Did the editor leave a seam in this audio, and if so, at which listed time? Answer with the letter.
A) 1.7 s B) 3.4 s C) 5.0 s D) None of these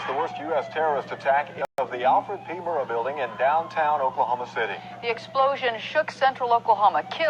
A